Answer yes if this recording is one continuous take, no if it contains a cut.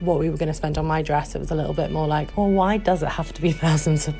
yes